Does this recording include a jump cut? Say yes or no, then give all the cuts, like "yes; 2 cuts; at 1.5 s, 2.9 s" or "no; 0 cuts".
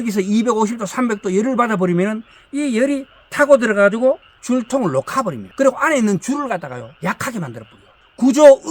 yes; 3 cuts; at 4.3 s, 5.4 s, 6.9 s